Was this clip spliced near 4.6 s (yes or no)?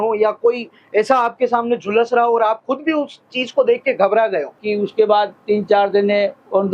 yes